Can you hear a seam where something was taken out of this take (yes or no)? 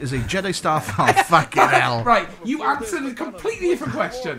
no